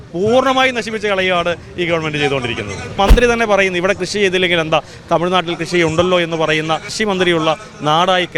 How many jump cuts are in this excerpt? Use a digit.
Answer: 2